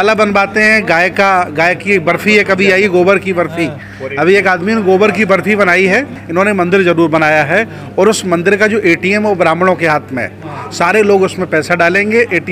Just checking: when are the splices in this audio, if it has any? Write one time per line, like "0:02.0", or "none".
0:06.2